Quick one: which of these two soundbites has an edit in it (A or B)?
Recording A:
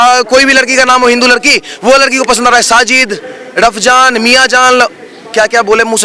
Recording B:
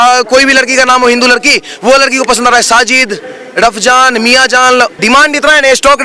B